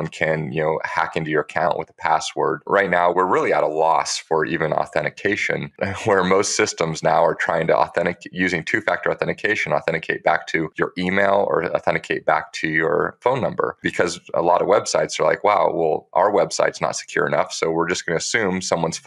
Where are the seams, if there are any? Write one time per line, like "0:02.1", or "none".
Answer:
0:02.6
0:05.7
0:10.7